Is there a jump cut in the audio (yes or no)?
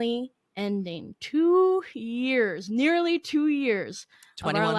no